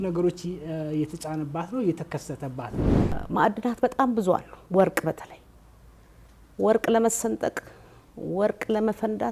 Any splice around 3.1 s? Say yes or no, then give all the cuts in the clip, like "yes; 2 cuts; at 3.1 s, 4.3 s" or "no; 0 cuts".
yes; 1 cut; at 3.1 s